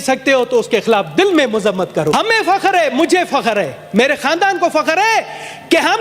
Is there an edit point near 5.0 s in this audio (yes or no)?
no